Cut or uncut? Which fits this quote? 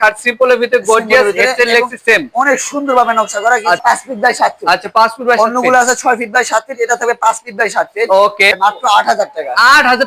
cut